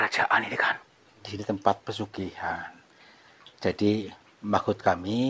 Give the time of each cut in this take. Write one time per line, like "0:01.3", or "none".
0:01.3

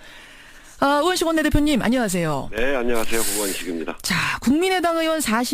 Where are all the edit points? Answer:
0:01.4

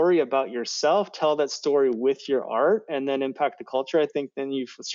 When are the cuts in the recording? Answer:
none

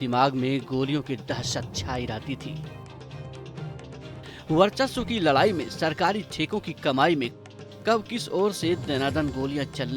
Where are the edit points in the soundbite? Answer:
none

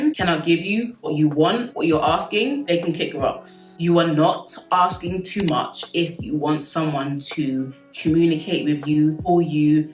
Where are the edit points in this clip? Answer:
none

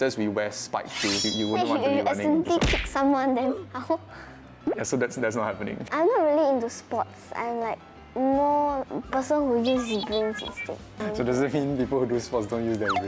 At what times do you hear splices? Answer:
0:01.2
0:05.8
0:08.9
0:11.0

